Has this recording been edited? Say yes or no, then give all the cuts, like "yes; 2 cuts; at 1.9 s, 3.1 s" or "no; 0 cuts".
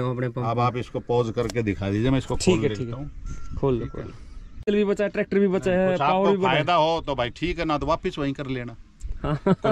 yes; 1 cut; at 4.7 s